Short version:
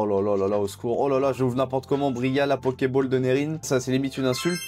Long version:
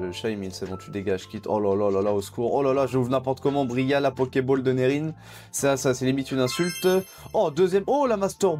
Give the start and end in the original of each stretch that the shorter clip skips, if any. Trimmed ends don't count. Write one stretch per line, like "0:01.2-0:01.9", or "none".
0:05.2-0:05.8